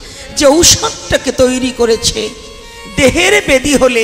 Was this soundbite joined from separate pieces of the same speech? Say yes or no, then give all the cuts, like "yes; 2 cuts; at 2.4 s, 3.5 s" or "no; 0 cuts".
no; 0 cuts